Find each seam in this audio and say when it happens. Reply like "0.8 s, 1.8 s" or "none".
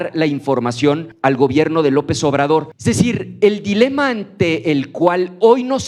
1.1 s, 2.7 s